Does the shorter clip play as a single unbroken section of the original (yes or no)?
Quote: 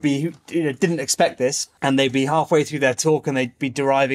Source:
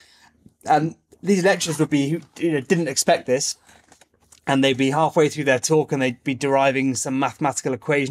no